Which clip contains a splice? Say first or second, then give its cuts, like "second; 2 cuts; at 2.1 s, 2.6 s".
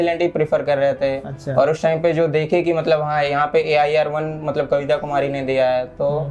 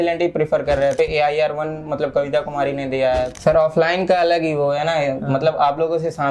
second; 2 cuts; at 0.9 s, 3.3 s